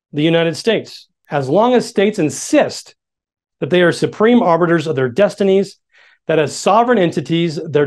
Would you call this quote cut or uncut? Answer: cut